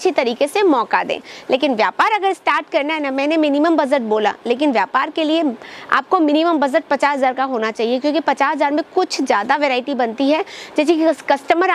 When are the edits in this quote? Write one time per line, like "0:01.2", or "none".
0:01.3